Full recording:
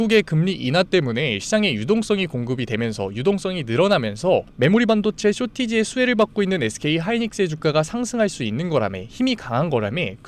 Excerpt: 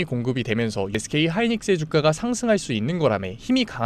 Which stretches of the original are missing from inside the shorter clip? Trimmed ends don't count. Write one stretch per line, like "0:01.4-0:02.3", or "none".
0:03.2-0:06.7